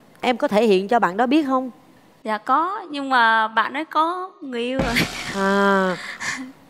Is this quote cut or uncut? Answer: uncut